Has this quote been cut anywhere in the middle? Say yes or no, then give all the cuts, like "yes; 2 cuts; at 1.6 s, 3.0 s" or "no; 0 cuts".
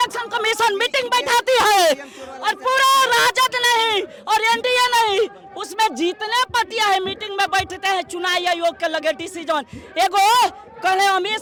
no; 0 cuts